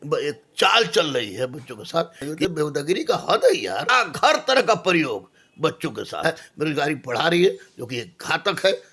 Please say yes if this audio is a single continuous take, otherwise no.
no